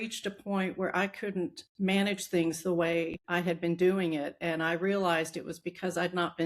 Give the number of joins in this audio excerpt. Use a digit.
1